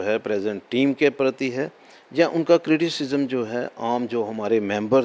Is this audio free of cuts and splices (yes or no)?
yes